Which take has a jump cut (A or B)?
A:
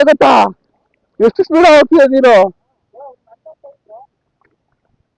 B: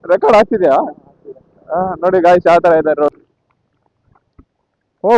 B